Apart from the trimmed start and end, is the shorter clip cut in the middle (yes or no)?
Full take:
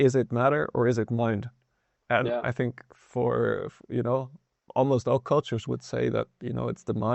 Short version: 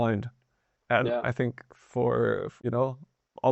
yes